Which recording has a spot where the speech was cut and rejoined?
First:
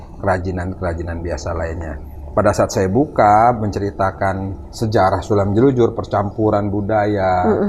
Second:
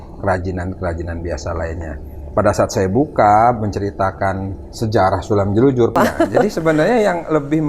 second; 1 cut; at 5.9 s

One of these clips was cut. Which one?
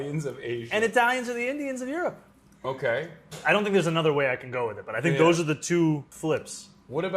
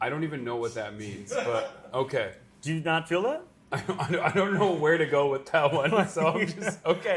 first; 1 cut; at 6.1 s

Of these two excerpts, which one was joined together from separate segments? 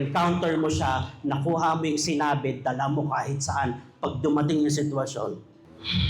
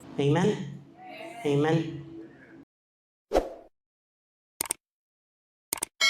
second; 1 cut; at 2.8 s

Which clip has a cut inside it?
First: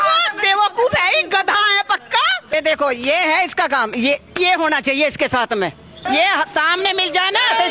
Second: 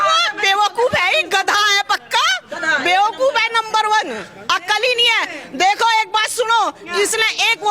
first; 2 cuts; at 2.5 s, 5.9 s

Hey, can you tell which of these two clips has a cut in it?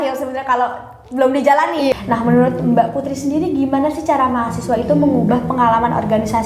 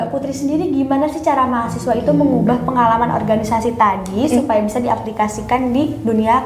first; 1 cut; at 1.9 s

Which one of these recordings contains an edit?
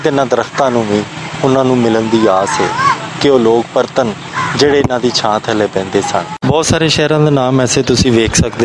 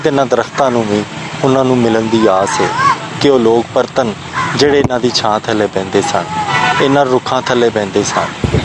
first; 1 cut; at 6.3 s

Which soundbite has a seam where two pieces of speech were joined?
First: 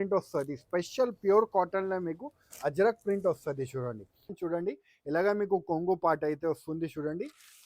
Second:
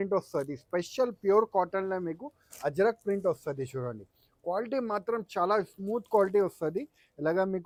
first; 1 cut; at 4.3 s

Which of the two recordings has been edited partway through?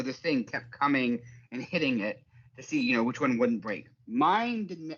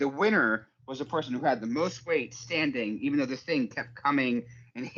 first; 1 cut; at 3.9 s

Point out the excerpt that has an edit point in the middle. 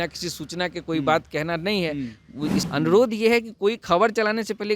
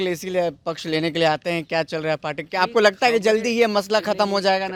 first; 1 cut; at 2.6 s

